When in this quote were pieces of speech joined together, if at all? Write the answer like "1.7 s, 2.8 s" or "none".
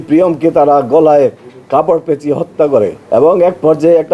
3.0 s